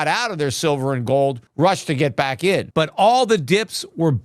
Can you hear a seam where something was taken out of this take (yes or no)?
yes